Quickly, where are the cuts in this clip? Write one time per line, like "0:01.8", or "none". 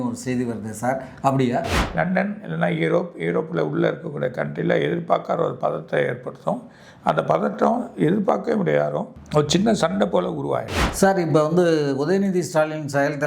0:01.8
0:09.2
0:10.8